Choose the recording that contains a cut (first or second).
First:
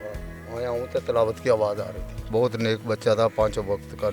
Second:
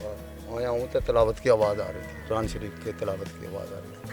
first